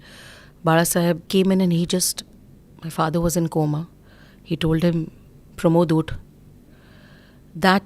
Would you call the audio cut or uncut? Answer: cut